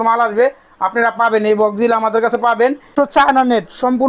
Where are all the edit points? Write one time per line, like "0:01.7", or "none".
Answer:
0:02.9